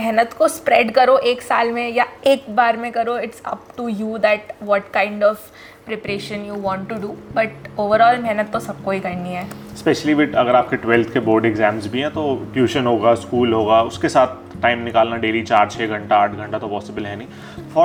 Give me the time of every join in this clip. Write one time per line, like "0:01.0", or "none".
none